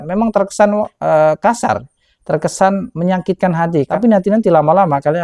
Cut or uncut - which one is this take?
cut